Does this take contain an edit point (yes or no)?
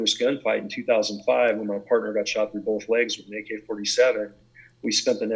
no